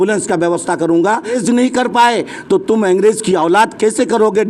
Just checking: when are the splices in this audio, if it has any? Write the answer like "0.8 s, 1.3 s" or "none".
1.4 s